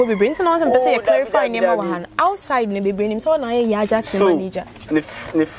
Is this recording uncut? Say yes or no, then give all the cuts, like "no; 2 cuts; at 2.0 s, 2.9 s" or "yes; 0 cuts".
yes; 0 cuts